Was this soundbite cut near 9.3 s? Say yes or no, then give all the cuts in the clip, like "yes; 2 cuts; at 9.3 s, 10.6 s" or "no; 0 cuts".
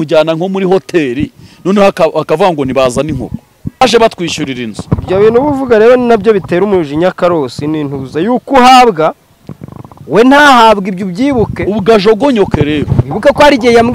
no; 1 cut; at 3.8 s